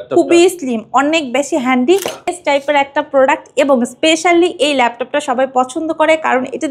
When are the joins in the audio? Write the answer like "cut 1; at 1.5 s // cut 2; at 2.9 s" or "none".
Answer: cut 1; at 2.3 s